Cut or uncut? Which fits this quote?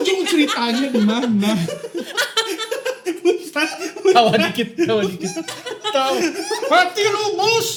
uncut